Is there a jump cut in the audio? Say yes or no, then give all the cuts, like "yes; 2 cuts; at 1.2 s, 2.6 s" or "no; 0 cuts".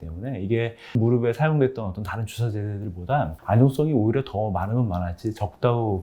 yes; 2 cuts; at 0.9 s, 3.4 s